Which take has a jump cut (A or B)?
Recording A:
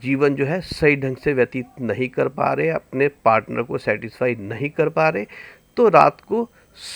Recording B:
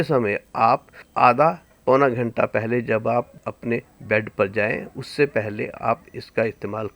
B